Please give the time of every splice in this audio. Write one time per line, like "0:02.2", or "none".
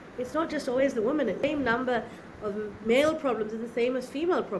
none